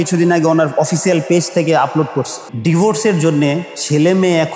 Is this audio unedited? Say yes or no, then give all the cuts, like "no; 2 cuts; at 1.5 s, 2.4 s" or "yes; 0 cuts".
no; 1 cut; at 2.5 s